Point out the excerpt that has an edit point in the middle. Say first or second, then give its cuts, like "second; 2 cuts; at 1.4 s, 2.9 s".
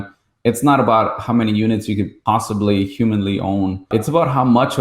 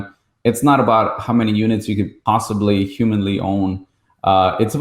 first; 1 cut; at 3.9 s